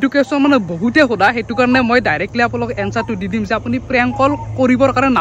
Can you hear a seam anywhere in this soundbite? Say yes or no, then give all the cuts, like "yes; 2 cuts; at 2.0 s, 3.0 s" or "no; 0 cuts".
no; 0 cuts